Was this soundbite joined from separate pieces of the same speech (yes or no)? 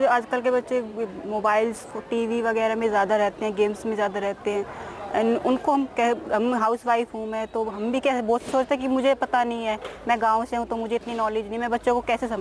no